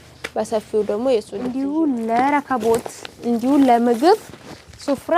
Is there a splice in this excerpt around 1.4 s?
yes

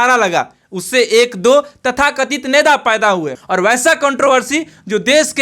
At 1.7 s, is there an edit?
no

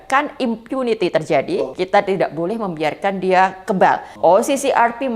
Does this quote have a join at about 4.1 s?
yes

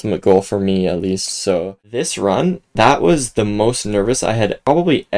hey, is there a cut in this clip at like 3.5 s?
no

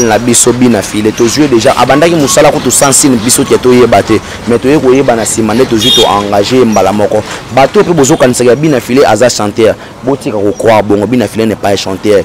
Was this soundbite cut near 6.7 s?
no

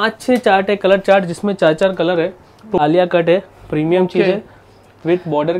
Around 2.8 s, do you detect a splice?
yes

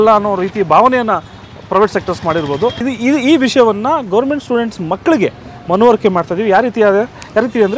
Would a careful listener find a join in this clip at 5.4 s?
no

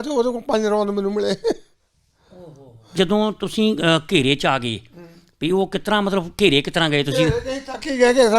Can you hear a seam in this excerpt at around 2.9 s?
yes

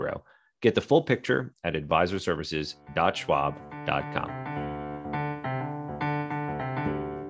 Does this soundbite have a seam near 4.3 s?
yes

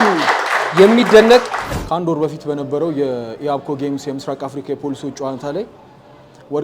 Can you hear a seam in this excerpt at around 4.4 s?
no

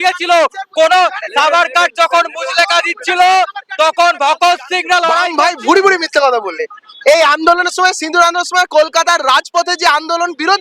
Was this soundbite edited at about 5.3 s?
yes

